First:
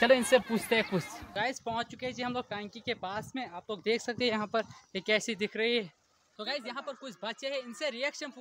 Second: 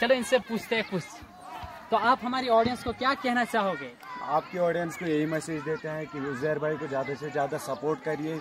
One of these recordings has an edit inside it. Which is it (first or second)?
first